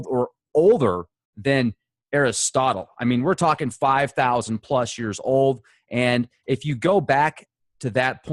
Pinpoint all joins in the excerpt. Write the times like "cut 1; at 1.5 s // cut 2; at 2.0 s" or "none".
none